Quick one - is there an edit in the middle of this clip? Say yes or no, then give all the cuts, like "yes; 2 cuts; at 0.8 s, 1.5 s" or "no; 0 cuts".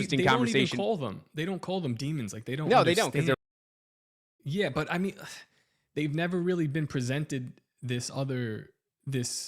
no; 0 cuts